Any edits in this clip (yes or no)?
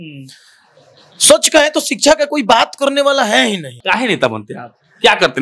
yes